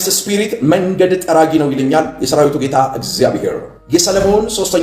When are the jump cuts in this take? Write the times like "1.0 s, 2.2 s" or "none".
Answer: 3.7 s

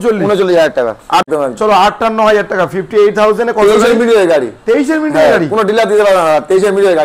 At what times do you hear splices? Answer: 1.2 s

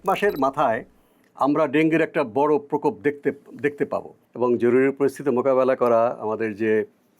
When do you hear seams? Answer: 4.2 s

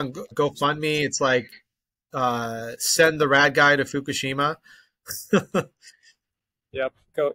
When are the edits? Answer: none

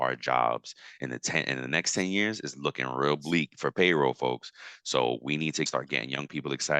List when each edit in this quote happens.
5.7 s

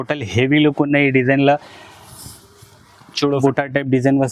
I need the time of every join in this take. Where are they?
3.4 s

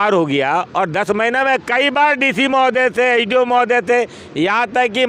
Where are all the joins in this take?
none

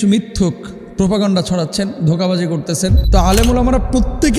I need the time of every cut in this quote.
3.0 s

